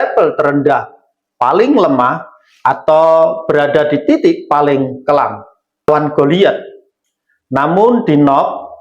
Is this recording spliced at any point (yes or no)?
yes